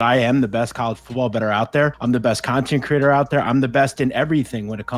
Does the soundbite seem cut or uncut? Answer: cut